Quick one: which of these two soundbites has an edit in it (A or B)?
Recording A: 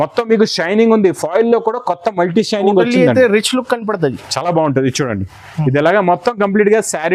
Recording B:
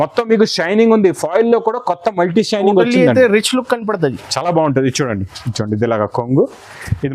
B